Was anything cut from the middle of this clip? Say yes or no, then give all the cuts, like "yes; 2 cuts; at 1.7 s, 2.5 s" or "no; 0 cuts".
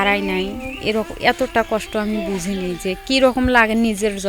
no; 0 cuts